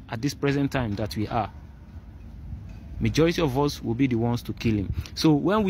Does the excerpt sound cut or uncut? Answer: uncut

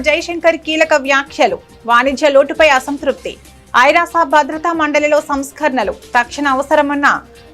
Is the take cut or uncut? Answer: uncut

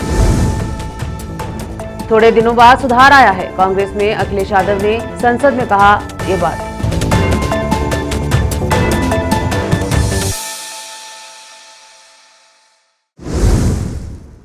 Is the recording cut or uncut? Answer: cut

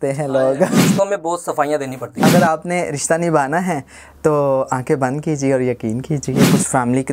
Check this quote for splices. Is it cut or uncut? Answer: cut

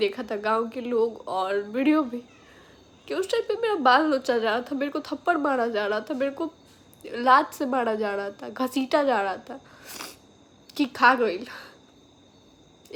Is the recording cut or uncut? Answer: uncut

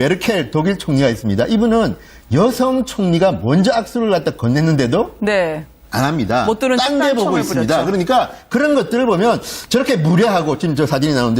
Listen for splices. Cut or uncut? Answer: cut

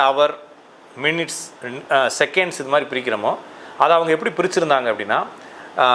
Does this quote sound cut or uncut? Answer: uncut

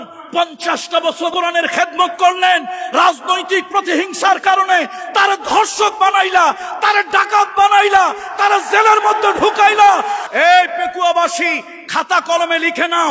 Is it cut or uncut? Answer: cut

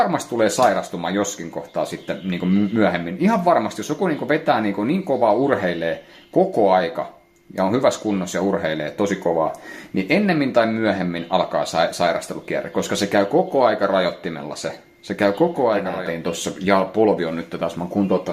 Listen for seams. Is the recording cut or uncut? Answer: cut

